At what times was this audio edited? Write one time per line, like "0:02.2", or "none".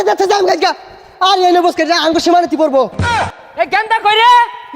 0:03.3

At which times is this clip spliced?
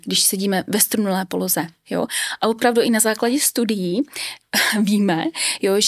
none

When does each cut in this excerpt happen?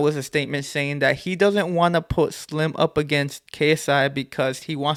none

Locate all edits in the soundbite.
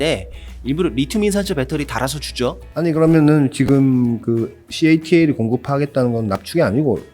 0:02.6

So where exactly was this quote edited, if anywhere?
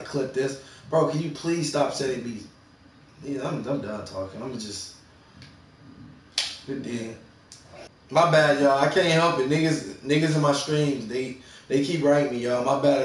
none

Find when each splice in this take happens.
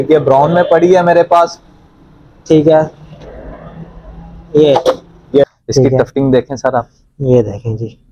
0:05.4

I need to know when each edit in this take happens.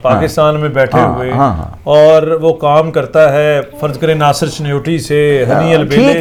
none

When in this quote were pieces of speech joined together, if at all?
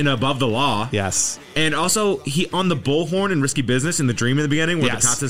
none

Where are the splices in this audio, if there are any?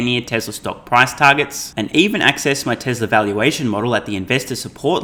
none

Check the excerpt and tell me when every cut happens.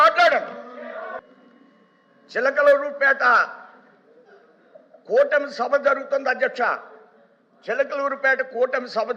0:01.2

